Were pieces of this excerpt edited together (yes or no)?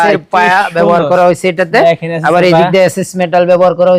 no